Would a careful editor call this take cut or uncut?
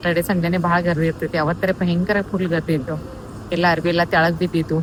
uncut